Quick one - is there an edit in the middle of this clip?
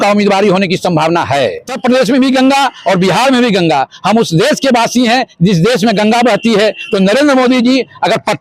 yes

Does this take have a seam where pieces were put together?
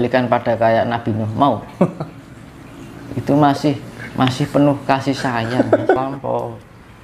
yes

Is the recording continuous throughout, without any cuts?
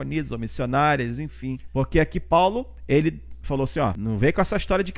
no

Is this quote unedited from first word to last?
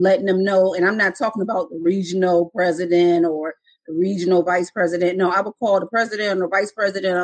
yes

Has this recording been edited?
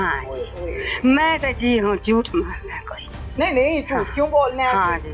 no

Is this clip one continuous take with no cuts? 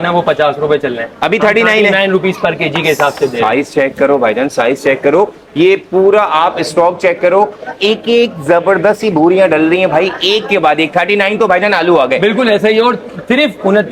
yes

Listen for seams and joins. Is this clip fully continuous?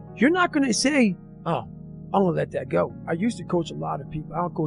no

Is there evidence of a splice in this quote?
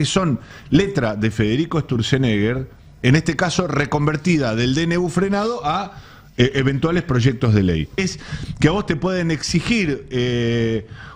yes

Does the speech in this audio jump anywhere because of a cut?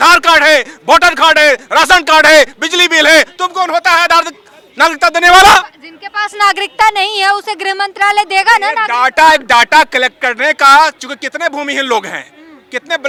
no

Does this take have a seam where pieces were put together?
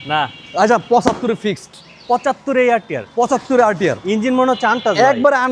no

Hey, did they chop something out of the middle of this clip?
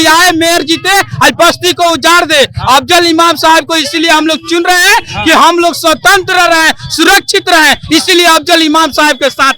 no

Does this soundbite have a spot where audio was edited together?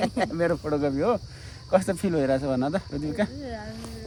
no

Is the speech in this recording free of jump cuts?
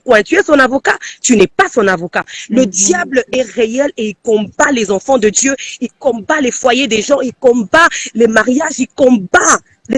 yes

